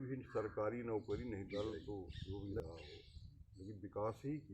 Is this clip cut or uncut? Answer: cut